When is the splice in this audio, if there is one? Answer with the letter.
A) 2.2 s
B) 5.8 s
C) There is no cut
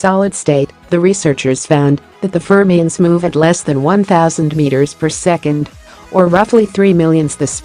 C